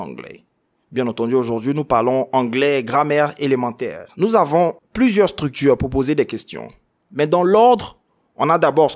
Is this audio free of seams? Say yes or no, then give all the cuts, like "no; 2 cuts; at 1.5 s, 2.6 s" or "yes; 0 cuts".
no; 2 cuts; at 4.0 s, 4.8 s